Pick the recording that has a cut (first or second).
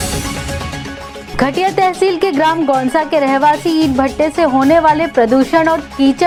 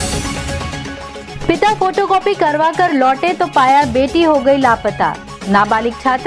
second